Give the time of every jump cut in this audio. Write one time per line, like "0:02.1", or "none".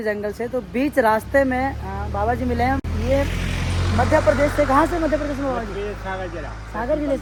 none